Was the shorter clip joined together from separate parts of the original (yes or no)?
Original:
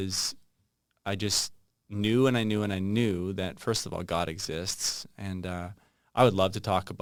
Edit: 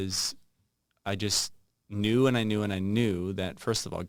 no